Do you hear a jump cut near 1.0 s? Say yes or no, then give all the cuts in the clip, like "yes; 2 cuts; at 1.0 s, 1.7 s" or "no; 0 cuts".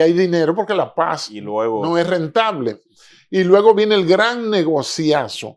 no; 0 cuts